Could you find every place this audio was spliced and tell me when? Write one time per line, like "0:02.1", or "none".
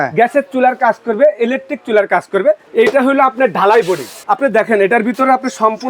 0:02.7
0:04.2